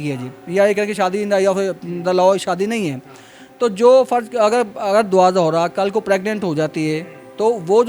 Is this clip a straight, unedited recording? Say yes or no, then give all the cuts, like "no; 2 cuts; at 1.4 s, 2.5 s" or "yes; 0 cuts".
yes; 0 cuts